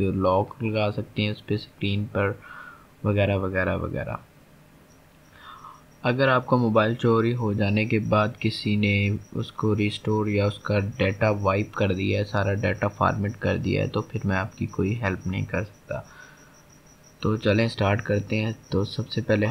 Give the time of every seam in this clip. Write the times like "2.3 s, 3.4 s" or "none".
none